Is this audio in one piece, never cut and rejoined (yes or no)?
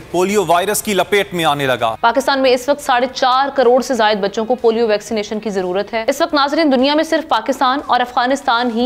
yes